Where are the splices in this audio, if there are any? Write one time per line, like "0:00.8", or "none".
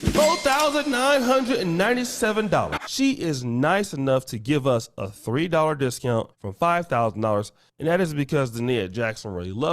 0:06.4

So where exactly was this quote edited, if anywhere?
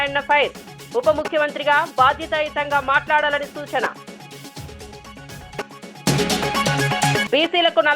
0:06.1

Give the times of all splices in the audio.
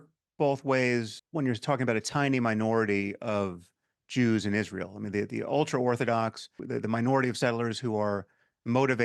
0:01.1
0:06.6

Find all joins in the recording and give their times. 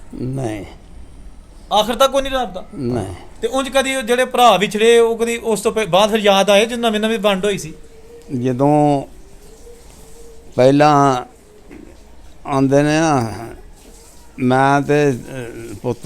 0:03.2

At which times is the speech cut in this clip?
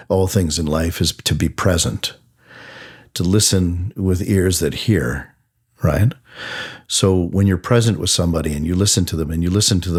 none

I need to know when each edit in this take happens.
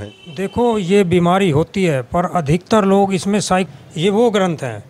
0:03.7

